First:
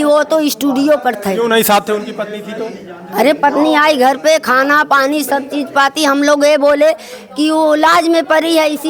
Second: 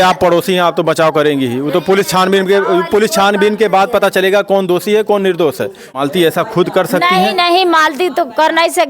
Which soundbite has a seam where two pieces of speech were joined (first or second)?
second